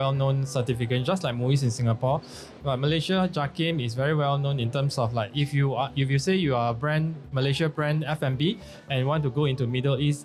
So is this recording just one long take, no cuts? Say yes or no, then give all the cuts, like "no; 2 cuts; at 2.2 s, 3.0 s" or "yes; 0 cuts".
yes; 0 cuts